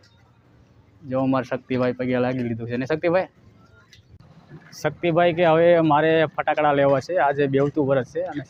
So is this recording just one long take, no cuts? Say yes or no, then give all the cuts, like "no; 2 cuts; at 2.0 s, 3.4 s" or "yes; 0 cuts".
yes; 0 cuts